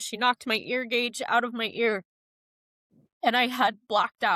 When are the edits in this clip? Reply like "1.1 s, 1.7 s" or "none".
none